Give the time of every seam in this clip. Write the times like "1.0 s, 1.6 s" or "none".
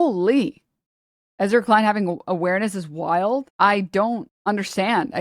3.5 s, 4.3 s

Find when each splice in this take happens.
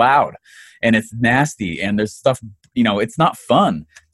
none

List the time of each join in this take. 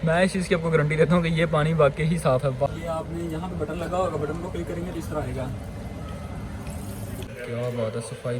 2.7 s, 7.3 s

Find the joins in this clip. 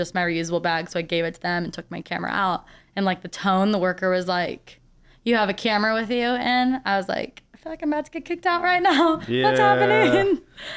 2.8 s

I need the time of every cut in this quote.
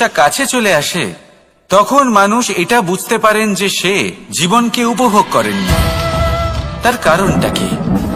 7.3 s

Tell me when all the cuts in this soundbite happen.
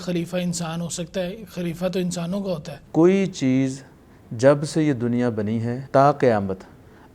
2.8 s, 5.8 s

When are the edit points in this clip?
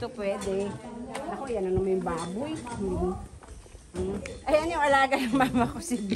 none

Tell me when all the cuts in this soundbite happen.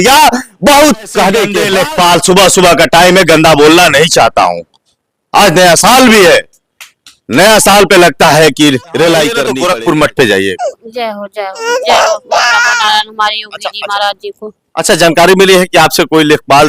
1.6 s, 9.5 s

